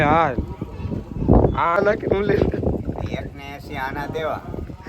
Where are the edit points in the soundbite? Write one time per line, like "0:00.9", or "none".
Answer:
0:01.7